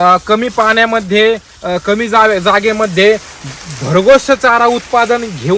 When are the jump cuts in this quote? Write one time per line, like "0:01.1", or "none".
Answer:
none